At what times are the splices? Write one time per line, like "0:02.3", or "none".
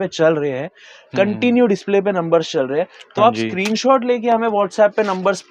none